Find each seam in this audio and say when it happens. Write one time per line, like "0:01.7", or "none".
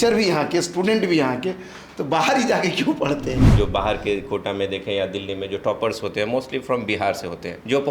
0:03.5